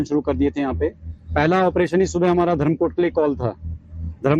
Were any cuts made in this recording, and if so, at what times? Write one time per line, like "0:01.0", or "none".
0:02.1